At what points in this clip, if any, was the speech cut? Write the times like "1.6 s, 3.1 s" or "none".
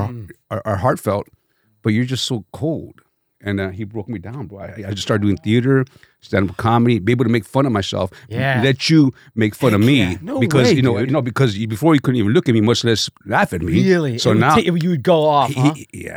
none